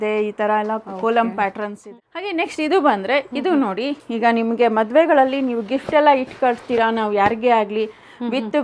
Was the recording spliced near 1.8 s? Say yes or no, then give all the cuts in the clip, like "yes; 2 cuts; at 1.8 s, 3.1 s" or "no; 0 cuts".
yes; 1 cut; at 1.8 s